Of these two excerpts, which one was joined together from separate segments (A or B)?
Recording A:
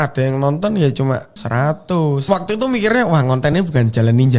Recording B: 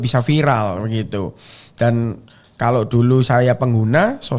A